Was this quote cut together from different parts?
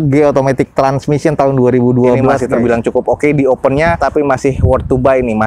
yes; 2 cuts; at 2.4 s, 4.0 s

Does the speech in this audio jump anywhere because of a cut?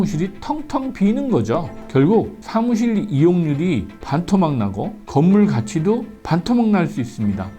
yes; 1 cut; at 1.7 s

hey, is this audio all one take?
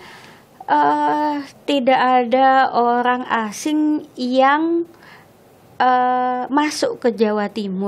yes; 0 cuts

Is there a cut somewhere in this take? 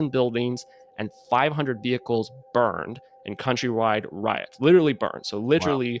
no; 0 cuts

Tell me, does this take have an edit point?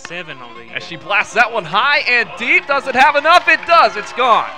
no; 0 cuts

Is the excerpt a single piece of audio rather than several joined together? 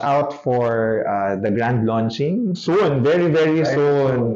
yes; 0 cuts

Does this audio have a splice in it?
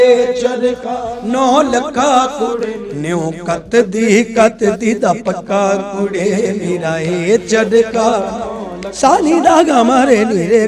no; 0 cuts

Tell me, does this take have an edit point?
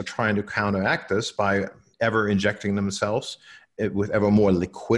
yes; 1 cut; at 1.8 s

